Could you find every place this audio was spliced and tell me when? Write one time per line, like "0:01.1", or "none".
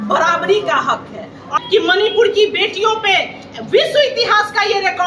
0:01.5